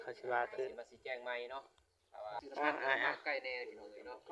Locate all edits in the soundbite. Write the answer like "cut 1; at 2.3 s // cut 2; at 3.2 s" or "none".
cut 1; at 2.4 s